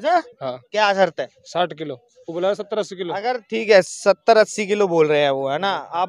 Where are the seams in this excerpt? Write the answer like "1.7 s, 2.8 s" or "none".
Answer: none